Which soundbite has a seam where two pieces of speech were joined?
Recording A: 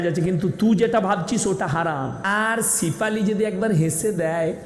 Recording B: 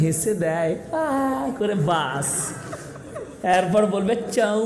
A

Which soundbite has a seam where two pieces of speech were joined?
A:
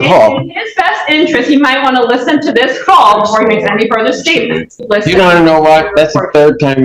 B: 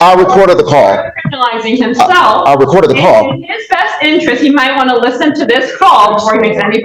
A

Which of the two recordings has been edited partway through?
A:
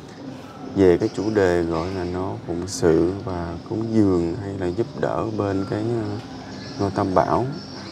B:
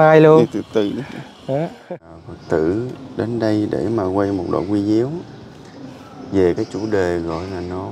B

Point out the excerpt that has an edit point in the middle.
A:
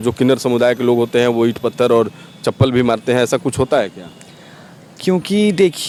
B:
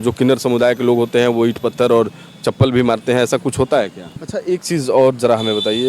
B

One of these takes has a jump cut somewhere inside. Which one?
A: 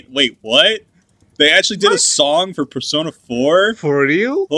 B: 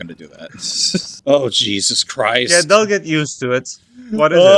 B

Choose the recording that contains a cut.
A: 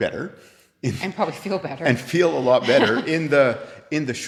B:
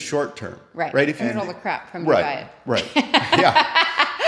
B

